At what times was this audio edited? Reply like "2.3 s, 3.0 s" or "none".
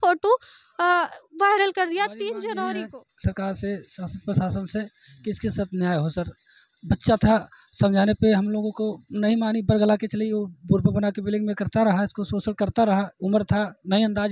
2.8 s